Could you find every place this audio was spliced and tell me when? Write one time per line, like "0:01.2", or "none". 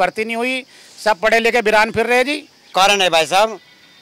0:02.7